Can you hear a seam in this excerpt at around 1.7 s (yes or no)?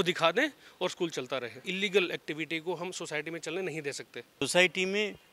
yes